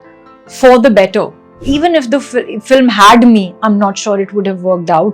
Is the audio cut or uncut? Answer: cut